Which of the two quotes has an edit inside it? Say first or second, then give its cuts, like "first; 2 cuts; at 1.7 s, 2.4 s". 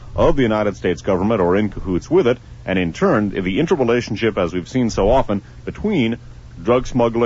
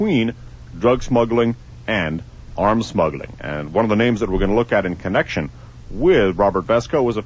second; 1 cut; at 5.9 s